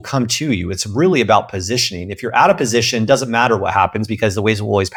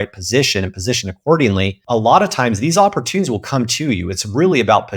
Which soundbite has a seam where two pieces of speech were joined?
second; 1 cut; at 1.8 s

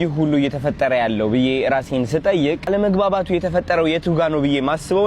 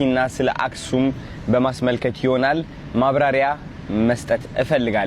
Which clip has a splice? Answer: first; 1 cut; at 2.7 s

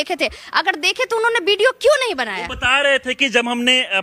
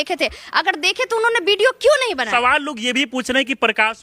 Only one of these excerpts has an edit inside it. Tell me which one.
second; 1 cut; at 2.2 s

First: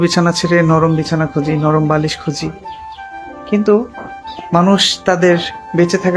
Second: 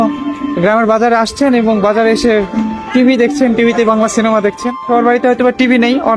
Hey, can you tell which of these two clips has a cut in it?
second; 1 cut; at 4.9 s

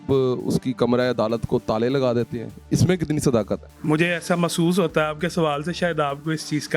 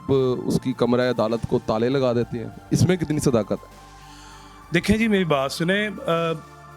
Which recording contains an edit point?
first; 1 cut; at 3.7 s

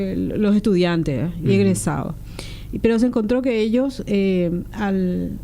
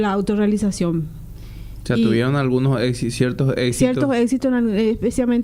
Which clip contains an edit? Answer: first; 1 cut; at 3.4 s

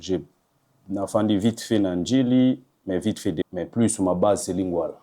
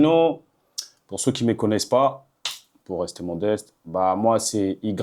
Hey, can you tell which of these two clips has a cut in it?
first; 1 cut; at 3.4 s

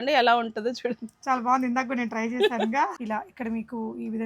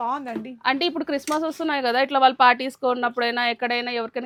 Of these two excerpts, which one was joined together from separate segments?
first; 1 cut; at 3.0 s

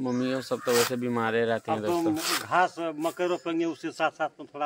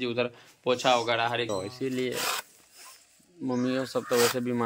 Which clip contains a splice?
second; 1 cut; at 1.5 s

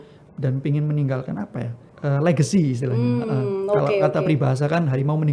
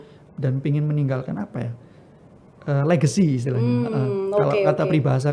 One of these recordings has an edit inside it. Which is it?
first; 1 cut; at 1.8 s

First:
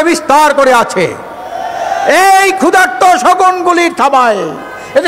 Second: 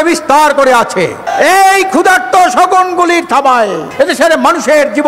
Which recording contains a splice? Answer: second; 2 cuts; at 1.2 s, 3.8 s

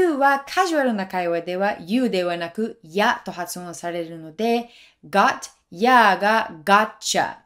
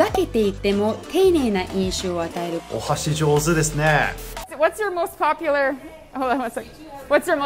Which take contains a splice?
second; 1 cut; at 4.3 s

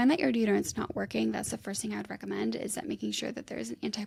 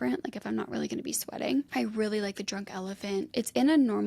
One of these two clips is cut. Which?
second; 2 cuts; at 1.7 s, 3.3 s

